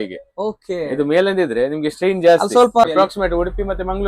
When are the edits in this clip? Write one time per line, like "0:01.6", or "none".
0:02.8